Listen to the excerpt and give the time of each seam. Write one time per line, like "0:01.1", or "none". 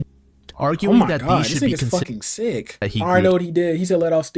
0:02.8